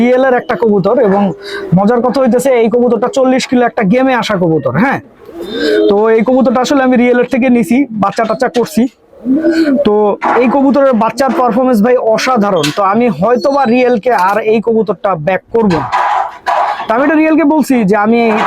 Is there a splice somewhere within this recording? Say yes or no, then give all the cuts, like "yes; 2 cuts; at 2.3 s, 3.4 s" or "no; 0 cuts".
no; 0 cuts